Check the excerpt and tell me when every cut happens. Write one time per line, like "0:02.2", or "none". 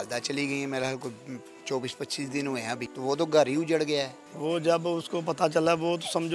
0:02.9
0:04.2